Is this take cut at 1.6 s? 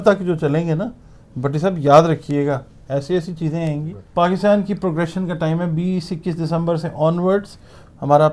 no; 1 cut; at 4.0 s

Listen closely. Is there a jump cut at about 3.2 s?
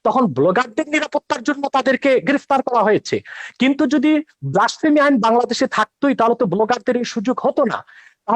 no; 0 cuts

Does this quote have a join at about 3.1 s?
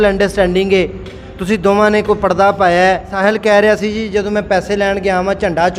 yes; 1 cut; at 3.1 s

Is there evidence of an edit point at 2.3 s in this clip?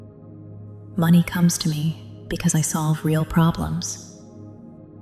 no; 2 cuts; at 0.8 s, 3.9 s

